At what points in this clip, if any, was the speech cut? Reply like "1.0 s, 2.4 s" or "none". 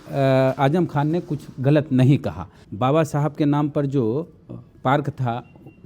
2.6 s